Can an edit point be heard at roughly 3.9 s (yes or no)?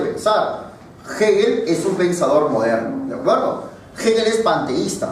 no